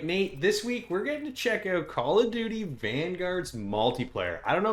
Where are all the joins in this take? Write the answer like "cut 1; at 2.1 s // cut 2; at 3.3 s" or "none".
none